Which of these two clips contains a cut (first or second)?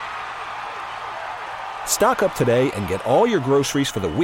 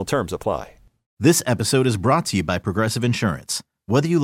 second